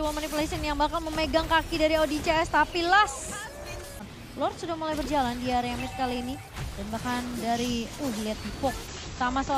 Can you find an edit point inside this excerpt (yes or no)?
yes